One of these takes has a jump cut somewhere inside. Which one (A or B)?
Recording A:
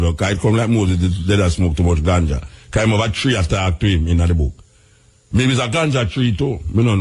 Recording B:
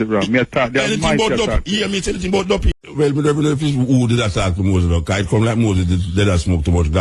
B